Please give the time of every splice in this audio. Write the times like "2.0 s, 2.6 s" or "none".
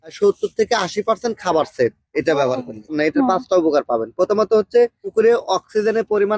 2.9 s